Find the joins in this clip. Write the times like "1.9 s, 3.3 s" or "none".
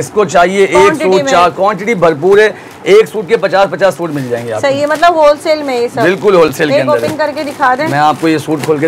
none